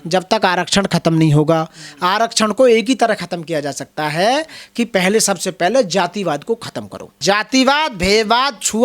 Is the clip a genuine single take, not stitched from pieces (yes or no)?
no